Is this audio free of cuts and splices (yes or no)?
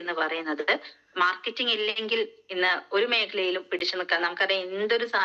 yes